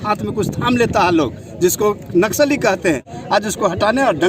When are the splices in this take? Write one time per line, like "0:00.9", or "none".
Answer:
0:03.1